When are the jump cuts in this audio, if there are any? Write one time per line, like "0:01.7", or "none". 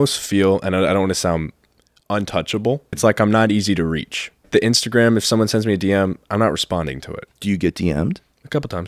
0:02.9
0:04.4